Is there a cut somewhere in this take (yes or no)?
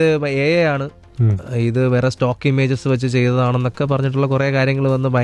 no